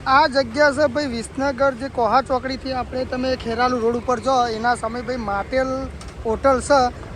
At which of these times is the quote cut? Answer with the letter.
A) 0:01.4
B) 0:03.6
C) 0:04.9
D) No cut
D